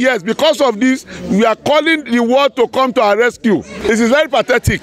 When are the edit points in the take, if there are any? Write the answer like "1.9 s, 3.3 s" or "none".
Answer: 3.7 s